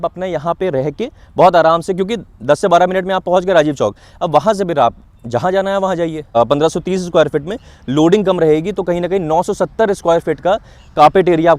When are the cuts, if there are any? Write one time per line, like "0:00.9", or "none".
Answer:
0:06.2